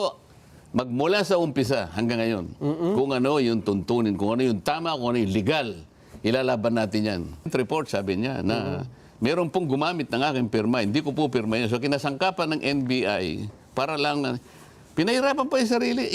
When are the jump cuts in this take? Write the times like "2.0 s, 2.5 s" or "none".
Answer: 7.5 s